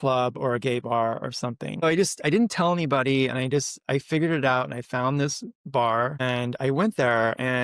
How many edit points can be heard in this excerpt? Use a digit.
2